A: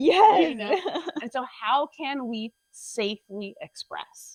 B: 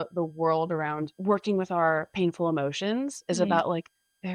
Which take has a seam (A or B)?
B